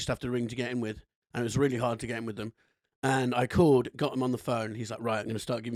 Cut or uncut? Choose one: uncut